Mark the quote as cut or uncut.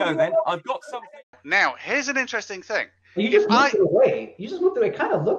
cut